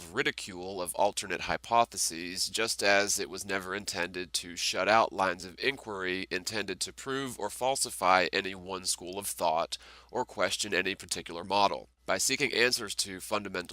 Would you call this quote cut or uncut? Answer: cut